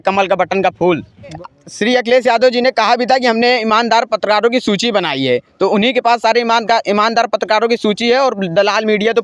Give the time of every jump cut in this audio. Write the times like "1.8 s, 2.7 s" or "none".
1.4 s